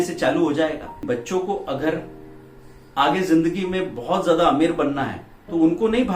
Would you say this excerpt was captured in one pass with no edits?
no; 1 cut; at 1.0 s

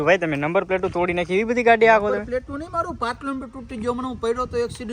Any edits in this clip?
no; 0 cuts

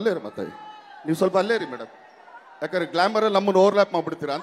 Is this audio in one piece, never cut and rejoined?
yes; 0 cuts

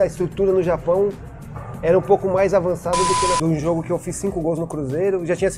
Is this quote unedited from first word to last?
no; 1 cut; at 3.4 s

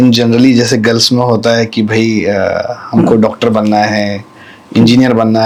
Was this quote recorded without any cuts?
yes; 0 cuts

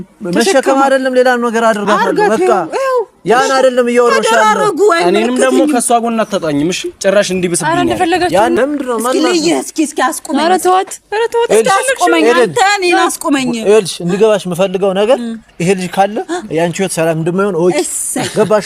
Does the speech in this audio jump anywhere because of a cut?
yes; 1 cut; at 8.6 s

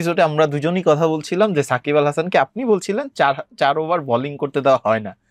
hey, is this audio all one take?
yes; 0 cuts

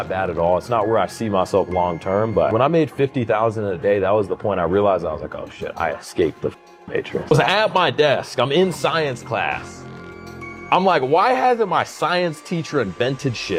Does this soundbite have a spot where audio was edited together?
no; 0 cuts

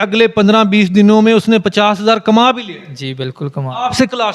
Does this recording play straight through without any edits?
yes; 0 cuts

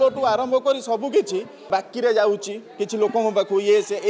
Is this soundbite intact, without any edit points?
no; 1 cut; at 1.7 s

